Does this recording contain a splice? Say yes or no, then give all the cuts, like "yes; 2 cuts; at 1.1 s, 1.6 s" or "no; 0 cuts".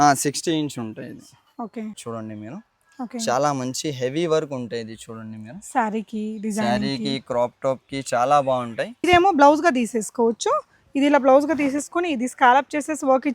yes; 2 cuts; at 2.0 s, 8.9 s